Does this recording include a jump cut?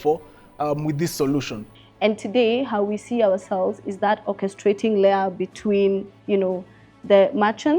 yes; 1 cut; at 1.6 s

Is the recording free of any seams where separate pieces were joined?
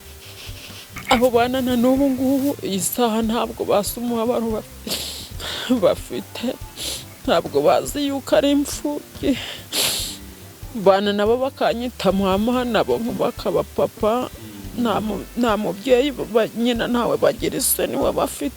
no; 1 cut; at 1.0 s

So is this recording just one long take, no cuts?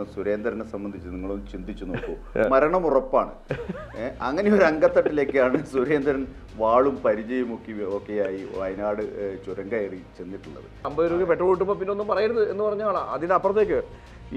no; 1 cut; at 10.9 s

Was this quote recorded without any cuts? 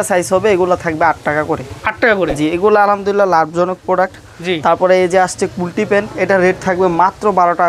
yes; 0 cuts

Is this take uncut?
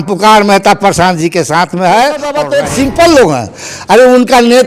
no; 1 cut; at 2.4 s

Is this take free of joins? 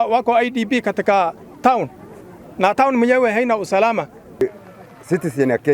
no; 1 cut; at 4.4 s

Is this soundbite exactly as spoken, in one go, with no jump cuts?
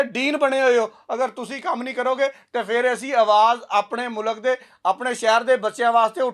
yes; 0 cuts

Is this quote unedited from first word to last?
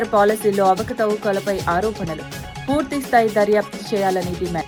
yes; 0 cuts

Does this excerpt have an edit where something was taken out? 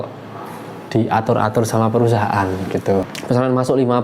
yes; 1 cut; at 3.1 s

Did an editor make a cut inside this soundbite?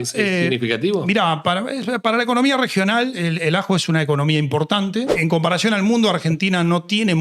yes; 1 cut; at 5.1 s

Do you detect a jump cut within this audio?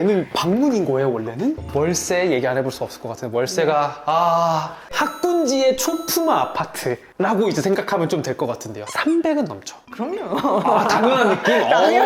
yes; 1 cut; at 1.6 s

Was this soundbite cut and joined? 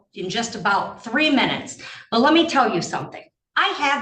no; 0 cuts

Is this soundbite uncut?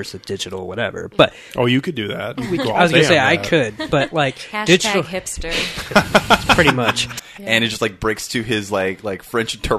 no; 1 cut; at 7.1 s

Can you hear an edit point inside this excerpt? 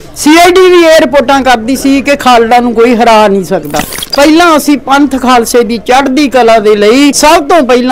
yes; 2 cuts; at 4.0 s, 7.2 s

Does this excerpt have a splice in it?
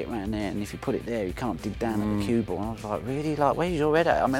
no; 0 cuts

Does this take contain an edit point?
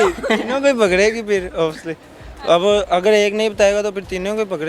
no; 0 cuts

